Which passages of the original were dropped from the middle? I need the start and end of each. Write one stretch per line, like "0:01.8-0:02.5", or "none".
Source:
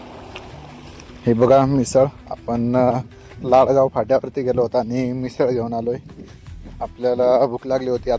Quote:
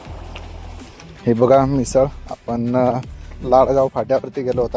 none